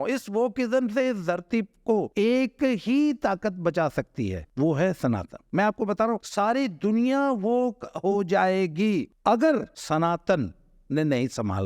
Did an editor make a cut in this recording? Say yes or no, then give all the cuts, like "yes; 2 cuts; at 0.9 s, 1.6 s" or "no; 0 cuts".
yes; 6 cuts; at 2.1 s, 4.4 s, 5.4 s, 6.3 s, 9.1 s, 9.8 s